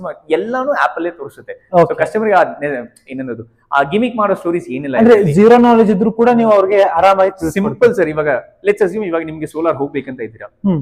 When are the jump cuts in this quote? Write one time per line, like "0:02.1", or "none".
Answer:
none